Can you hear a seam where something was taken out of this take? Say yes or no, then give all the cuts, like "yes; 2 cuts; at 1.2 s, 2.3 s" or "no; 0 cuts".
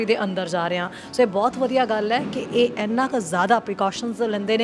no; 0 cuts